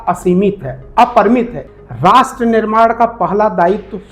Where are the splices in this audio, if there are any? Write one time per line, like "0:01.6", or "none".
0:01.6

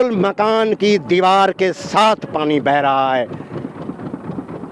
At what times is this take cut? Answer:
none

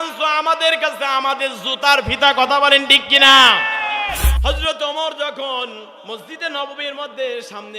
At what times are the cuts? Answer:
0:04.3

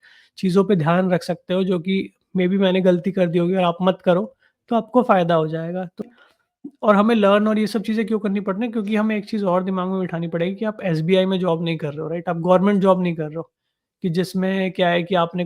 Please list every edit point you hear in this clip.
0:06.0

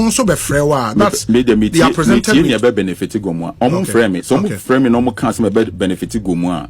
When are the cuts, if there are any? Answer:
none

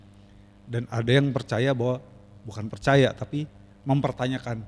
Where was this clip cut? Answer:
none

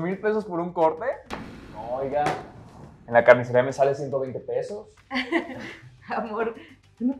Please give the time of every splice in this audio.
none

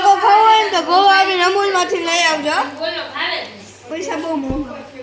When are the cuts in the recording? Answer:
none

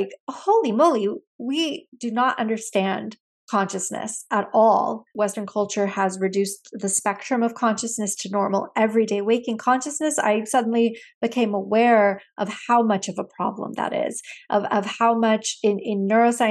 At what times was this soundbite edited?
0:05.1

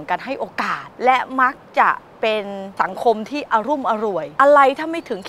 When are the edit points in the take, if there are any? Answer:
0:00.8
0:02.6
0:04.3

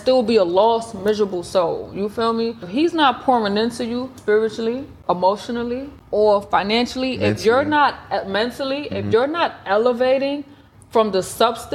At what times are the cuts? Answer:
0:02.7
0:04.1
0:05.0
0:05.9

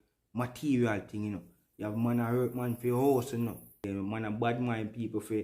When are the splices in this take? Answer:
0:03.8

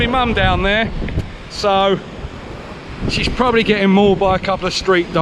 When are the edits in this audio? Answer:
none

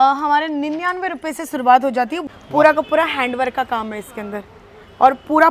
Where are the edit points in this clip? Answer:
0:02.3

